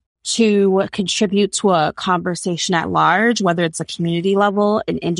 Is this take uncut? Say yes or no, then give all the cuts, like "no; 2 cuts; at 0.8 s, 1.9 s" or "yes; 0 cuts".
yes; 0 cuts